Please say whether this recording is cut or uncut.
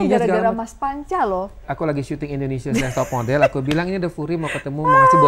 cut